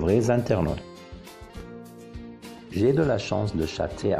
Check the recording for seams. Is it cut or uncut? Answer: cut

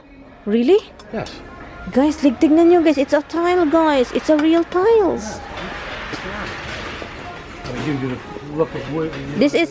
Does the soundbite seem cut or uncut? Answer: uncut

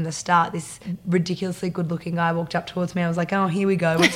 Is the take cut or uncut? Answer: cut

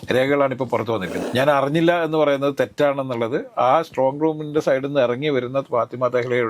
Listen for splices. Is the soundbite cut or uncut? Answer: cut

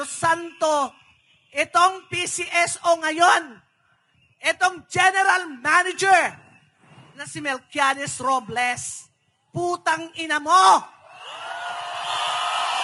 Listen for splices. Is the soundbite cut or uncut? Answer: uncut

